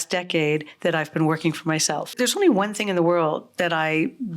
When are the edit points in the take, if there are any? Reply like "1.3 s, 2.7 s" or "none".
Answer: 2.1 s